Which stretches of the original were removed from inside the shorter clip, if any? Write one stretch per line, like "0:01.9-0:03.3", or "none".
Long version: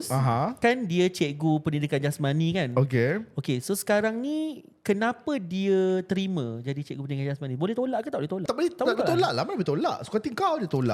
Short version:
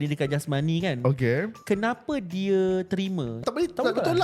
0:03.3-0:04.7
0:06.6-0:08.4

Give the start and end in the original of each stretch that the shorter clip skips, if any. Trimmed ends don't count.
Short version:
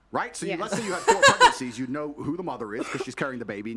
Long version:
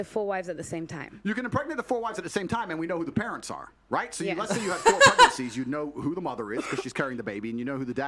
none

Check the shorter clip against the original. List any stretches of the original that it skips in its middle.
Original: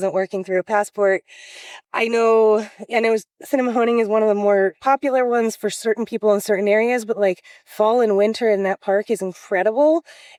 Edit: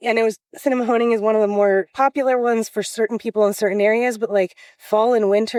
none

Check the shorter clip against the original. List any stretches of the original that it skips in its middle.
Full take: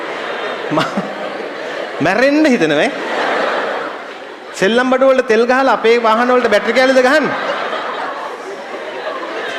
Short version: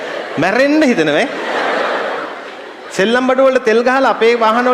none

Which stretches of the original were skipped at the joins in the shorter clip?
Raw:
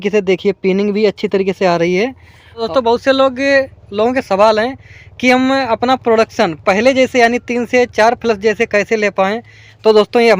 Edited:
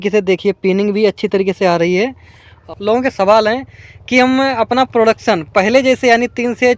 0:02.6-0:03.7

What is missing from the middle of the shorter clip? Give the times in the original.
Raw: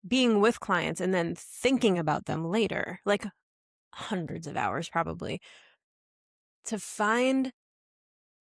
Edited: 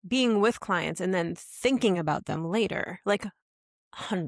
none

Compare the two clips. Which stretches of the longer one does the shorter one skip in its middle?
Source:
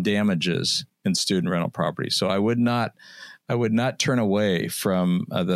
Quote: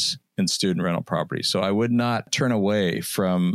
0:03.0-0:04.0

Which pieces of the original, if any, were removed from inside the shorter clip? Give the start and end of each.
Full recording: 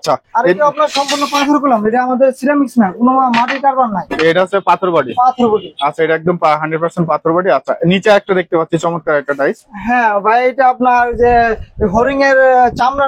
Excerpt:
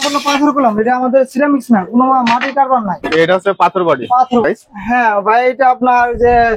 0:05.5-0:09.4

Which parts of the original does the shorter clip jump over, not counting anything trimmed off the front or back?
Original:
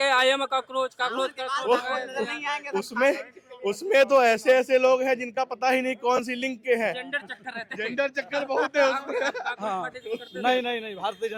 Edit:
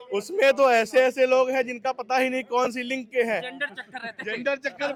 none

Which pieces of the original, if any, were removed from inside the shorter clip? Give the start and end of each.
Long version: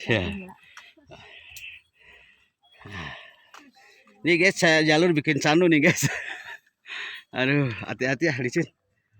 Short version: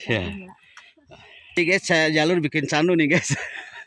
0:01.6-0:04.3

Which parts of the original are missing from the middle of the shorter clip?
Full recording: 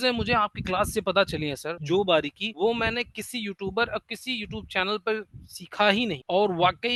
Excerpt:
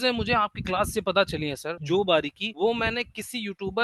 none

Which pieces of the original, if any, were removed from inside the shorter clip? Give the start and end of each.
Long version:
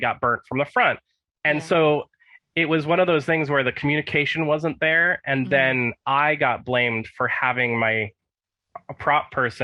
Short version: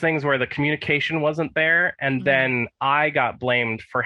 none

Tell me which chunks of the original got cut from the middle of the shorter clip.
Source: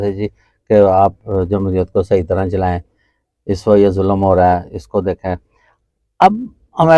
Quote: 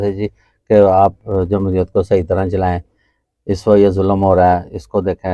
none

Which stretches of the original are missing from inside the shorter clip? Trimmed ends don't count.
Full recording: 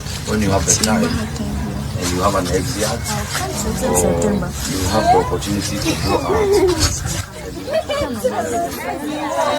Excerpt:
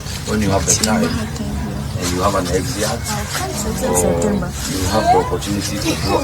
none

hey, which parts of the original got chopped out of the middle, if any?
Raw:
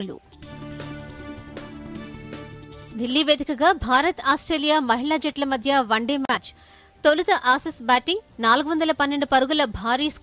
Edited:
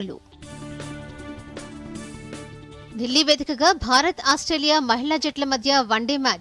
none

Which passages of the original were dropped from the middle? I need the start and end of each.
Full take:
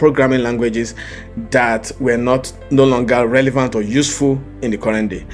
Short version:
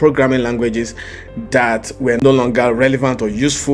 0:02.2-0:02.7

